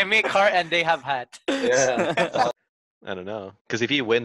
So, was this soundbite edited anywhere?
yes; 1 cut; at 2.5 s

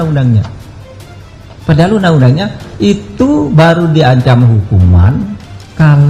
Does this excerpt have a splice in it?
no; 0 cuts

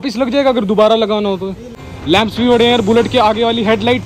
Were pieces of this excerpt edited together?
yes; 1 cut; at 1.9 s

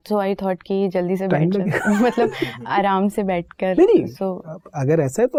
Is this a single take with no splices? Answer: yes; 0 cuts

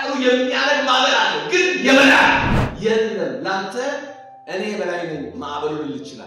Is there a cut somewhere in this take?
yes; 1 cut; at 2.7 s

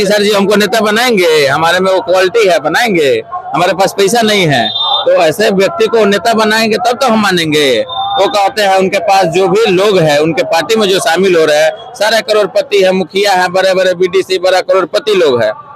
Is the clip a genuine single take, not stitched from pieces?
yes; 0 cuts

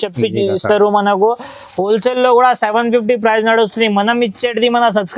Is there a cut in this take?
no; 0 cuts

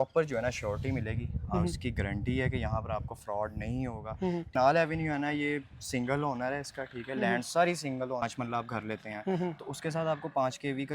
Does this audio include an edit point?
yes; 2 cuts; at 4.5 s, 8.2 s

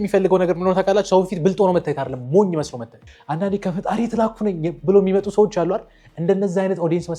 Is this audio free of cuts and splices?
no; 1 cut; at 3.1 s

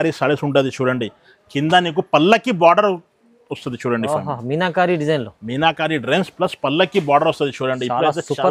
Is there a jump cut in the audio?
no; 0 cuts

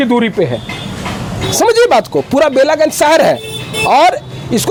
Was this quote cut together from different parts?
no; 0 cuts

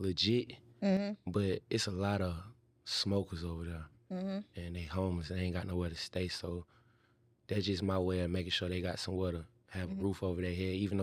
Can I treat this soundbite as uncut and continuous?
yes; 0 cuts

